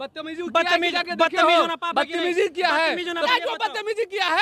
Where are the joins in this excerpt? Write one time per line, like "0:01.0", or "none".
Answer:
0:03.3